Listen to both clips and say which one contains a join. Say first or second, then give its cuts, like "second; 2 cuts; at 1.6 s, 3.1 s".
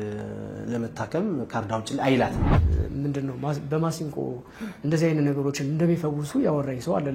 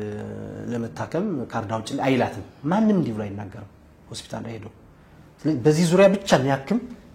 first; 1 cut; at 2.5 s